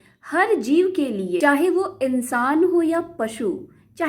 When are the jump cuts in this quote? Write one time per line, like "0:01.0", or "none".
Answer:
0:01.4